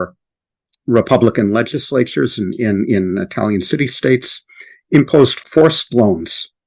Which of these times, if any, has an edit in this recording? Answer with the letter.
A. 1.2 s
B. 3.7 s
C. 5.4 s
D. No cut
C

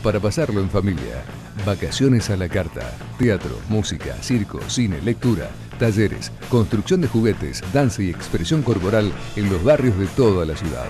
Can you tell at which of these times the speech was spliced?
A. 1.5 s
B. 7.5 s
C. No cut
C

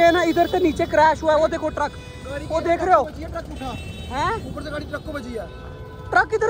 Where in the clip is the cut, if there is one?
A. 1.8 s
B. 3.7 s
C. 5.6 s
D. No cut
D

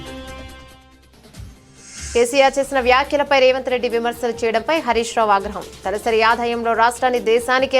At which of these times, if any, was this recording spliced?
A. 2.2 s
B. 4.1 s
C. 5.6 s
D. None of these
A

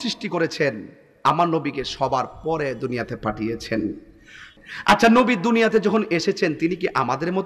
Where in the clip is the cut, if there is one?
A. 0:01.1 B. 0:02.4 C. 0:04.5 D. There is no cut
C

